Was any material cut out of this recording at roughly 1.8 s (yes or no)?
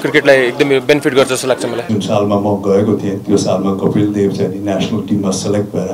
yes